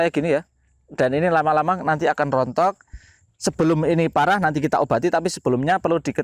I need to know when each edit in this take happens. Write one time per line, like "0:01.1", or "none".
none